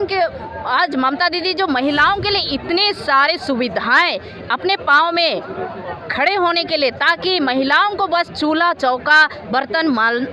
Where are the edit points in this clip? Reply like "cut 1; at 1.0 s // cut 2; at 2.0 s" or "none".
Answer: none